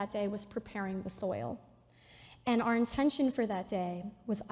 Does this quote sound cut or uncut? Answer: uncut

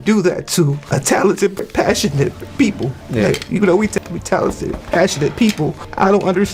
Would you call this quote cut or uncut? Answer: uncut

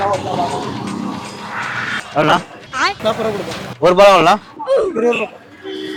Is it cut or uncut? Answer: uncut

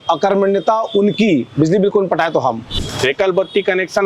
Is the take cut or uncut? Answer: cut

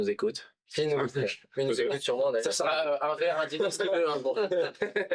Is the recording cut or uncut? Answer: uncut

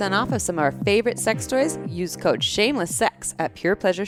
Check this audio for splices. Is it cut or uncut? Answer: uncut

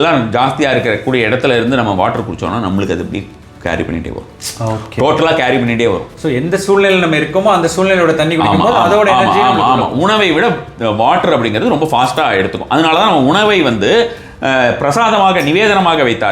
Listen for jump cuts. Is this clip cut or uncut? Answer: uncut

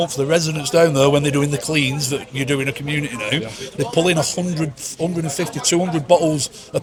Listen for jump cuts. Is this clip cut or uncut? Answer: uncut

